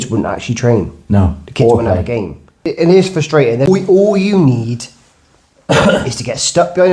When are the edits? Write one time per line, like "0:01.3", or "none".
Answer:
0:02.6
0:03.7